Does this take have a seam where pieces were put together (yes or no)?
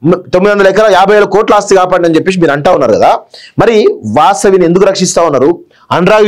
no